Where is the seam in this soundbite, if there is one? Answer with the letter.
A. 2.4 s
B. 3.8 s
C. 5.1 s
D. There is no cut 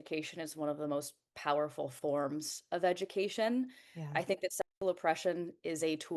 D